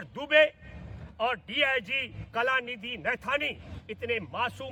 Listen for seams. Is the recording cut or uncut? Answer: uncut